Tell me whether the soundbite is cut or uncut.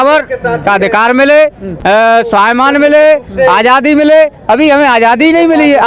uncut